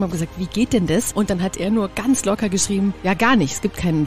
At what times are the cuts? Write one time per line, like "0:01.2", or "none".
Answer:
0:01.6
0:03.0